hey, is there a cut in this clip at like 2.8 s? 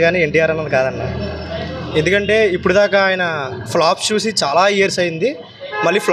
no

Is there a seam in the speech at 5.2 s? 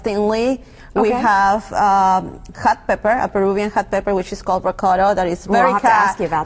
yes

